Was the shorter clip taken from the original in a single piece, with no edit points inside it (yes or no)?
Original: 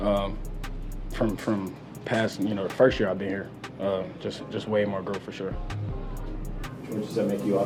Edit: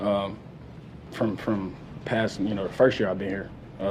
yes